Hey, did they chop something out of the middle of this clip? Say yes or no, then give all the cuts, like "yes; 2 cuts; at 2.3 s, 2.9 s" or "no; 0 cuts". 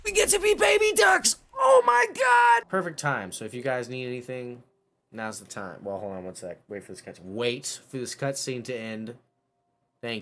yes; 1 cut; at 2.7 s